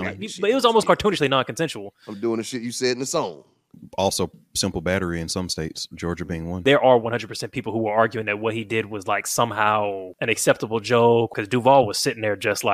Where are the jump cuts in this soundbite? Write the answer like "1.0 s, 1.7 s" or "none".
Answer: 6.6 s, 10.1 s, 11.4 s